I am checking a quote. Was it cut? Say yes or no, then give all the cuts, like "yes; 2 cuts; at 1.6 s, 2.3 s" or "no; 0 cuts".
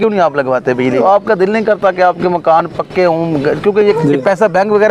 yes; 2 cuts; at 0.9 s, 4.0 s